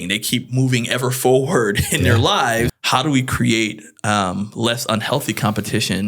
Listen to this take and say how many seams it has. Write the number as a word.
one